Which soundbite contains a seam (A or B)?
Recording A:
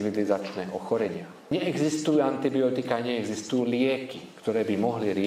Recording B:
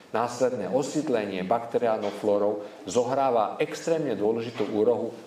A